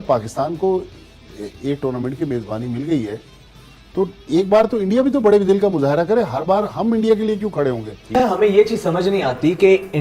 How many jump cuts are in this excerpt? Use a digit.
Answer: 1